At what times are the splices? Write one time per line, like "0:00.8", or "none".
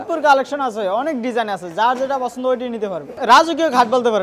0:03.1